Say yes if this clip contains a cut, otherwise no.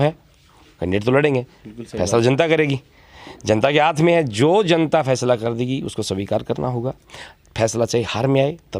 no